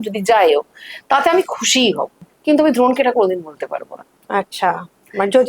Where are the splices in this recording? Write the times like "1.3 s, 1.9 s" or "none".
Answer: 2.3 s